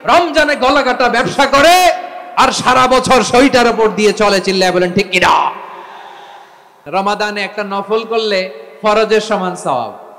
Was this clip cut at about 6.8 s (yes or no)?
yes